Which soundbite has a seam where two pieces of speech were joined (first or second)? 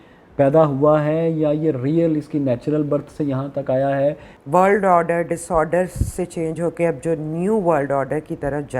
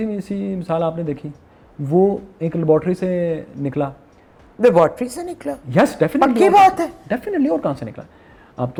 first